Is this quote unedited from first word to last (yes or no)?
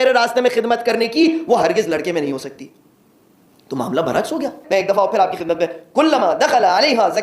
no